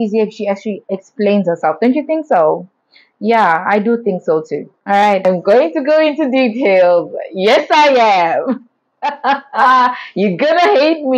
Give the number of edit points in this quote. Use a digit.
1